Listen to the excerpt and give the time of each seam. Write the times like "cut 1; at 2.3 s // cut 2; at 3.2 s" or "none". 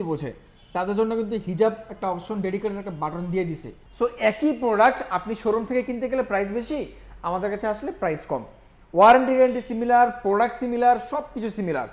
cut 1; at 3.8 s